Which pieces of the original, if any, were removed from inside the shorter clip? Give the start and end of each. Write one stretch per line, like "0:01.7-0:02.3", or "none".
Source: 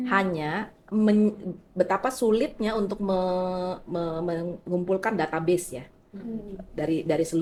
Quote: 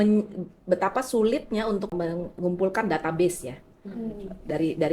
0:03.0-0:04.2